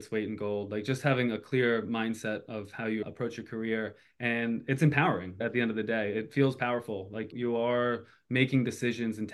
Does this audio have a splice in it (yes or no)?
yes